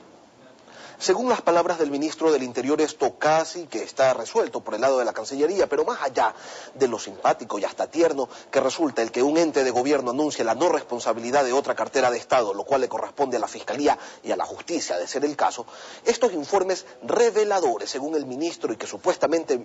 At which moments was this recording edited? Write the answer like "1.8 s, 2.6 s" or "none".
none